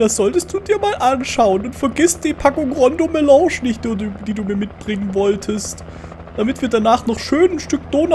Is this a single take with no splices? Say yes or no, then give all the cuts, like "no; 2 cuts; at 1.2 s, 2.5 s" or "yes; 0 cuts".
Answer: yes; 0 cuts